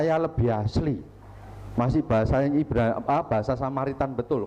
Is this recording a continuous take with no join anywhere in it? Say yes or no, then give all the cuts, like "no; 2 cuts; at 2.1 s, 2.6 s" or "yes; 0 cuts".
yes; 0 cuts